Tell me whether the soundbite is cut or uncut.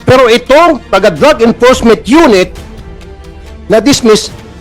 cut